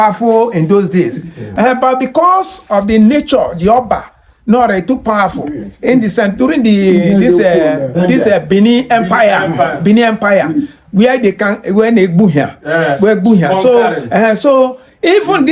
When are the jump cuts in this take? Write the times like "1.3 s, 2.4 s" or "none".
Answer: 1.4 s

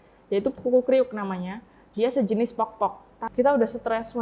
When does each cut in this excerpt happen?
3.1 s

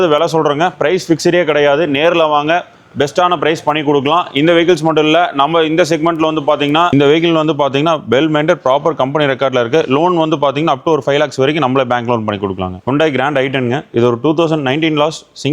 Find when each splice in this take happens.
6.9 s, 12.8 s

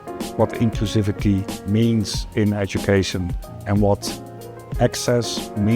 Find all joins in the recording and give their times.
4.6 s

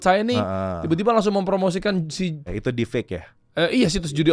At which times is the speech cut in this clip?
2.5 s

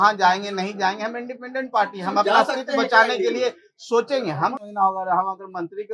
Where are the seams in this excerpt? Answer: 4.6 s

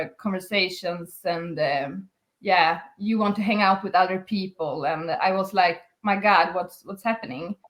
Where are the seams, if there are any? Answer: none

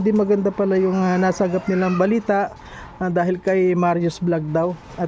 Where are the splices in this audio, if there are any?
none

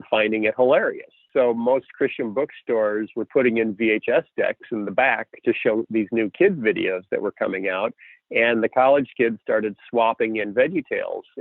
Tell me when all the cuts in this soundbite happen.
1.2 s

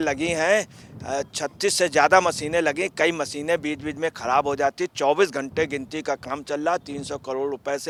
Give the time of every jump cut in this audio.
none

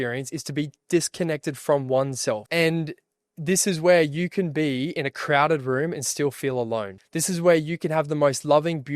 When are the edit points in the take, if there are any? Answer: 2.4 s, 7.0 s

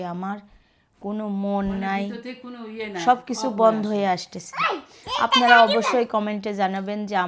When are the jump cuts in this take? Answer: none

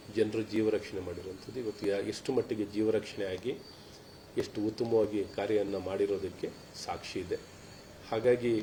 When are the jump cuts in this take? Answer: none

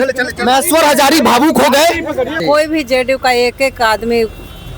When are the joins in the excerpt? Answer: 2.4 s

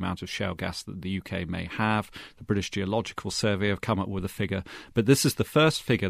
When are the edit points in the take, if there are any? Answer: none

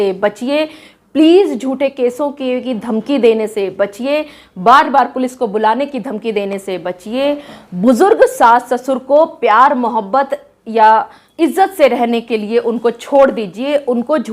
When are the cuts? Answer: 11.2 s

